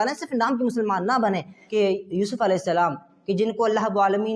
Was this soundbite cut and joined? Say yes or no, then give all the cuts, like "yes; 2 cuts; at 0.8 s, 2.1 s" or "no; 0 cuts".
yes; 1 cut; at 1.6 s